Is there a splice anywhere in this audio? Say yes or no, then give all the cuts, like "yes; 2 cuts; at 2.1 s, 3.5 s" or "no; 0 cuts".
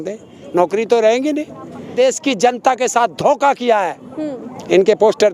yes; 1 cut; at 1.9 s